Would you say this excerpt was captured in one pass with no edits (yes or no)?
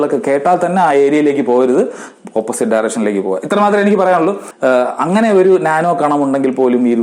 no